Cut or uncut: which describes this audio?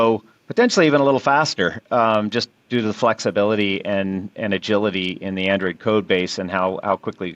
uncut